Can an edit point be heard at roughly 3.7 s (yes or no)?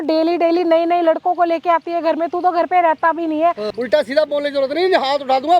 yes